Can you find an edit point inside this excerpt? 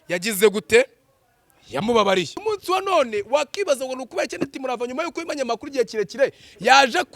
yes; 1 cut; at 2.4 s

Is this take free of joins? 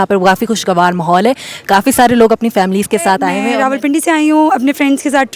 no; 1 cut; at 3.4 s

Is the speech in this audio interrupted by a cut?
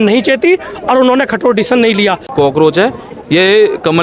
yes; 1 cut; at 2.3 s

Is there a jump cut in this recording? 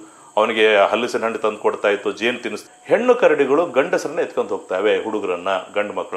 yes; 1 cut; at 2.6 s

